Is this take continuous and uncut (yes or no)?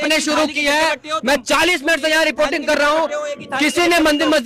yes